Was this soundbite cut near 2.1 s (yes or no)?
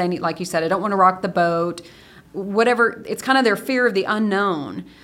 yes